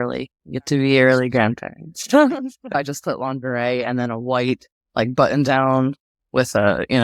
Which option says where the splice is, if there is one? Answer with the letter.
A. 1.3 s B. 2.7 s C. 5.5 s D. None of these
B